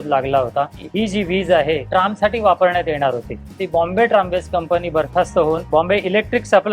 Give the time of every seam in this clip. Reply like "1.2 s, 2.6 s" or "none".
0.8 s, 1.9 s, 3.6 s, 5.6 s